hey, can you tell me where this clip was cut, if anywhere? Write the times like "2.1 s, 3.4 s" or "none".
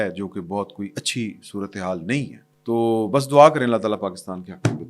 2.5 s